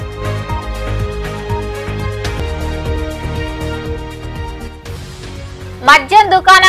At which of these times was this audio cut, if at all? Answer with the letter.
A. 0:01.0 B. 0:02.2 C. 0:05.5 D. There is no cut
B